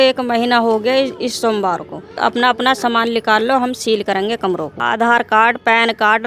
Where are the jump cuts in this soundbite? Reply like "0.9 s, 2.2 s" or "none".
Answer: 2.1 s, 4.7 s